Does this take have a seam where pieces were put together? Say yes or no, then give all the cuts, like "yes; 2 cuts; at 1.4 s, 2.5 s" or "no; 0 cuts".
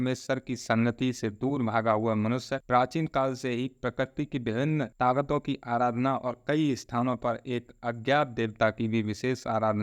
no; 0 cuts